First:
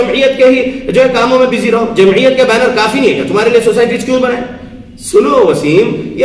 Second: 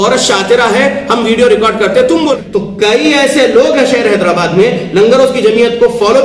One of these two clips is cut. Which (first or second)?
second